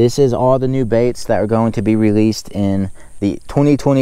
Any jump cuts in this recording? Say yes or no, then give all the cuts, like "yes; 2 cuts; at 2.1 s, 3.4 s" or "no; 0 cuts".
no; 0 cuts